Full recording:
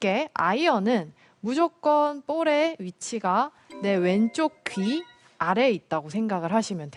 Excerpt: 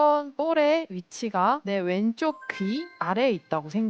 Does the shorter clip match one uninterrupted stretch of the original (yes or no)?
no